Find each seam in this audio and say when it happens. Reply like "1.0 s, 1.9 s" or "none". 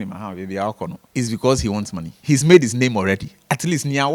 1.0 s, 2.1 s